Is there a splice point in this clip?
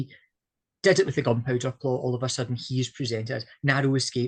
no; 0 cuts

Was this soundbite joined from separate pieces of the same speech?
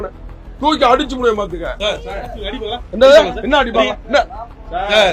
no; 0 cuts

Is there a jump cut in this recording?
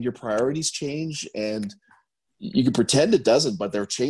yes; 1 cut; at 2.4 s

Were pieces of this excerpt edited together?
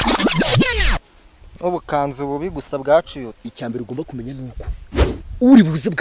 no; 0 cuts

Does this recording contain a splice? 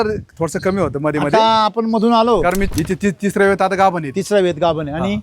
yes; 1 cut; at 2.6 s

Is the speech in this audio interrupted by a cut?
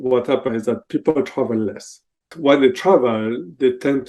yes; 1 cut; at 2.3 s

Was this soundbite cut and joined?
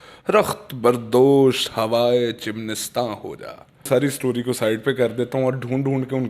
yes; 1 cut; at 3.9 s

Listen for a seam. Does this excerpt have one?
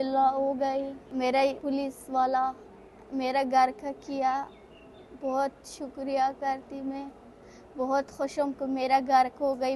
no; 0 cuts

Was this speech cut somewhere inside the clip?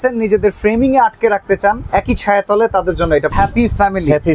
yes; 2 cuts; at 1.8 s, 3.3 s

